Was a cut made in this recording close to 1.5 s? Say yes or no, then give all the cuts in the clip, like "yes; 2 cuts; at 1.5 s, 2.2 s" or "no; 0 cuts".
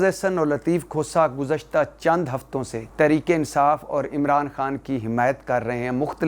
no; 1 cut; at 2.8 s